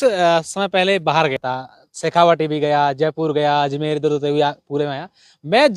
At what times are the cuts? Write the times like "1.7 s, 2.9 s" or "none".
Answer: 1.4 s